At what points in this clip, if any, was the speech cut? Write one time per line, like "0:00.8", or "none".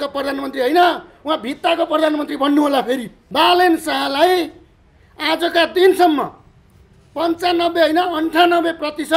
0:03.2